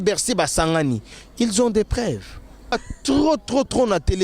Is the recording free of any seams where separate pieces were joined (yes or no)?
no